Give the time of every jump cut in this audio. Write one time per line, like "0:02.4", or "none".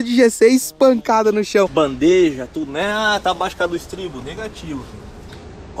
0:01.7